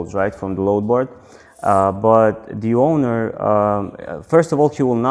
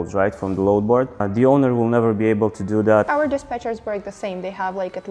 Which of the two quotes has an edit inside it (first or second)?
second